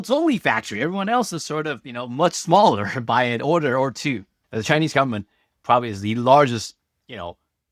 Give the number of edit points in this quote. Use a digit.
1